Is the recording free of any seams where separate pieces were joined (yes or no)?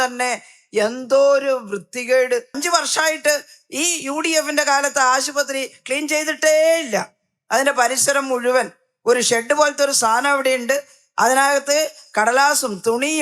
no